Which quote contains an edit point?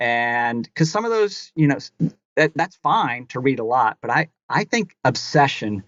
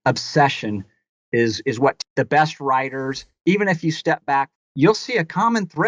second; 2 cuts; at 2.0 s, 4.5 s

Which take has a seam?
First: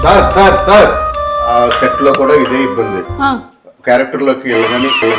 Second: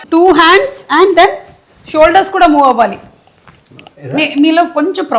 first; 1 cut; at 1.4 s

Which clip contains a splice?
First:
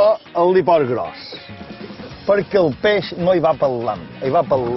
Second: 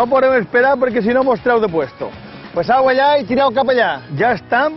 second; 1 cut; at 2.4 s

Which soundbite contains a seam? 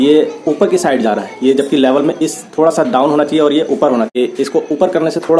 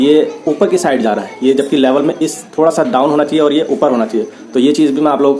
first; 1 cut; at 4.1 s

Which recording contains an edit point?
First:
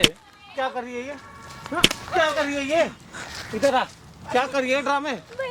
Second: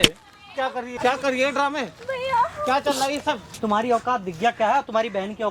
second; 2 cuts; at 0.9 s, 3.5 s

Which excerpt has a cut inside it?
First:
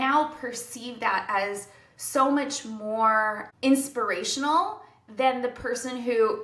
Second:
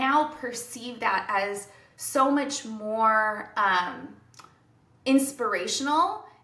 first; 1 cut; at 3.4 s

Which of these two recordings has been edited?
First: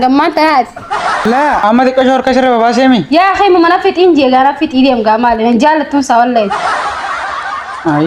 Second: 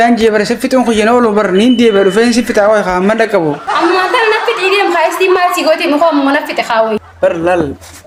first; 1 cut; at 1.5 s

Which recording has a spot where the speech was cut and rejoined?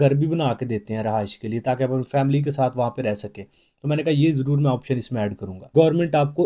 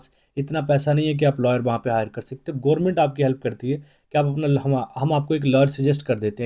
first; 1 cut; at 5.5 s

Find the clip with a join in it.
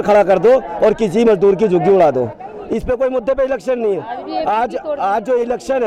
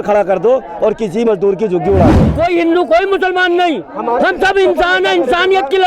second; 1 cut; at 2.2 s

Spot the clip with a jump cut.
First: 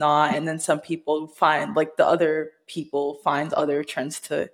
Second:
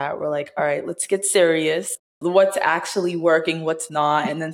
second; 1 cut; at 2.1 s

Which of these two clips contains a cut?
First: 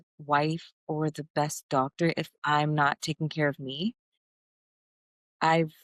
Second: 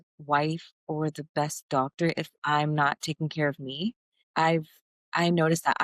second; 1 cut; at 4.1 s

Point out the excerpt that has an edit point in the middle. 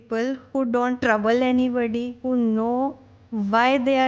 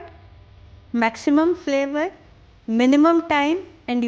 first; 2 cuts; at 1.0 s, 2.1 s

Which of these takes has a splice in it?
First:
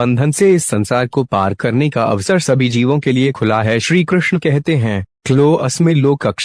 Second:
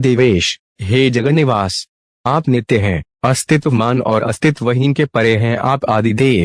first; 1 cut; at 3.6 s

